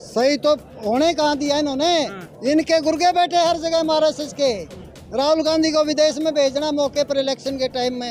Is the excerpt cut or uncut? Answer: uncut